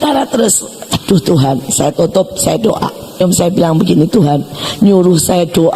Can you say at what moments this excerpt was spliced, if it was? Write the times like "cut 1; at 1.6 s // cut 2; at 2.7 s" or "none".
cut 1; at 0.9 s // cut 2; at 3.2 s